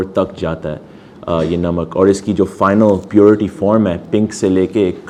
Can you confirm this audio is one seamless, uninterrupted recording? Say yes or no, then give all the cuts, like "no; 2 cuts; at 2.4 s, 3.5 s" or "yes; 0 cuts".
yes; 0 cuts